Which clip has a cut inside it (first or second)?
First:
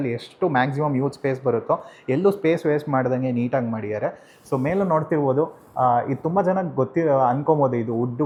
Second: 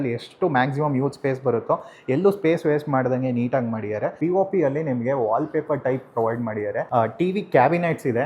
second